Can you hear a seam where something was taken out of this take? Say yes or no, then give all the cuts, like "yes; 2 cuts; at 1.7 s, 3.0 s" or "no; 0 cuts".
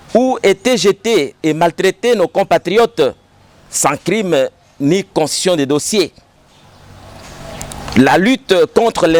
no; 0 cuts